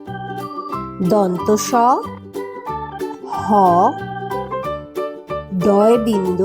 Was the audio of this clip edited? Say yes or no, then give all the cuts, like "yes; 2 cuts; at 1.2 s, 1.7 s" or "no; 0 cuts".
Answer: yes; 1 cut; at 0.9 s